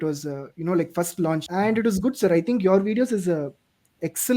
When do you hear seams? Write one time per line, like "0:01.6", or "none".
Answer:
0:01.5